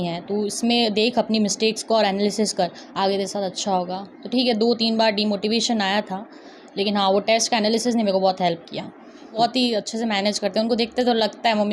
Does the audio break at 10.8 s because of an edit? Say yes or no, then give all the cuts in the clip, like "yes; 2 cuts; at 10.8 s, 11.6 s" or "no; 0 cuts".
no; 1 cut; at 9.4 s